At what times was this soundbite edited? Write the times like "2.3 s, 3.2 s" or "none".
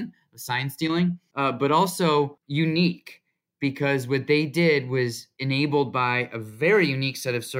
1.2 s, 2.4 s, 5.3 s